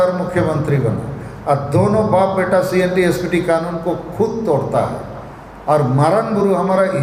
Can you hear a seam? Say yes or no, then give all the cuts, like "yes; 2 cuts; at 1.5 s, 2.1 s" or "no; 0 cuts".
no; 0 cuts